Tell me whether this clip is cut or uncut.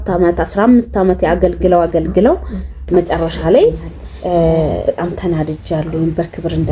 cut